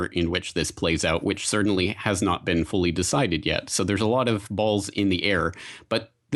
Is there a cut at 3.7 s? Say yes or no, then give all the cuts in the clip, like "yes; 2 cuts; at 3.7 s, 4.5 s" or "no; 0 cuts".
no; 1 cut; at 2.1 s